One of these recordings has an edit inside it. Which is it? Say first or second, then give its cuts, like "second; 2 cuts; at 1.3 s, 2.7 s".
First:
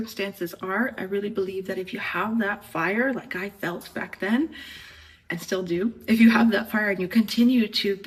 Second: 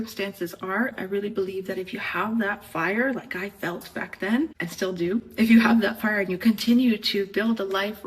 second; 1 cut; at 4.6 s